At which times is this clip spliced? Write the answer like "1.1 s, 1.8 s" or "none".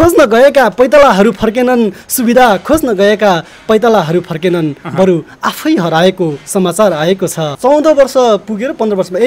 7.5 s